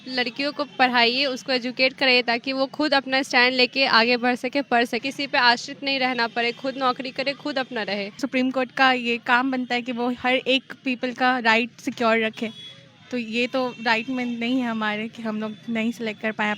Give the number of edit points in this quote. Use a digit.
2